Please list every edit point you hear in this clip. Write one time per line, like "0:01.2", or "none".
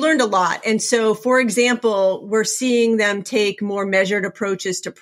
none